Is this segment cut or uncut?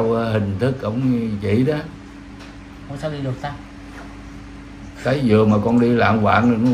uncut